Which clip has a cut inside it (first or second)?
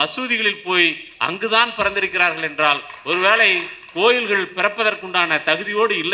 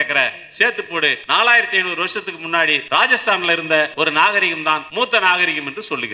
second